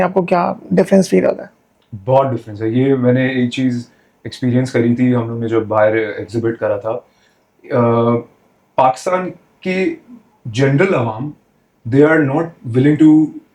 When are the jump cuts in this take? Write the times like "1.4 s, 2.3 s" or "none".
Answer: none